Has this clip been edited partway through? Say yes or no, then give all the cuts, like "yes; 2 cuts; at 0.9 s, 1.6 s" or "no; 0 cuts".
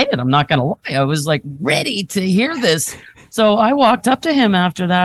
yes; 2 cuts; at 3.1 s, 4.0 s